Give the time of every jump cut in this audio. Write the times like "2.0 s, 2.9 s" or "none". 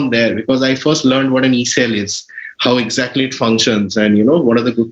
none